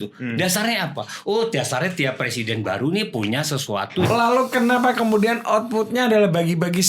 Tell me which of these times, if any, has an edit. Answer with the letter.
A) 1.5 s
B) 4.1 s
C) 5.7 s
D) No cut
B